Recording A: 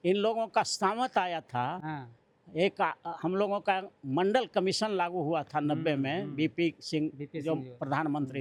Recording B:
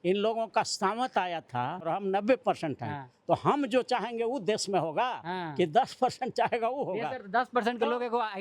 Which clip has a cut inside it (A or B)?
B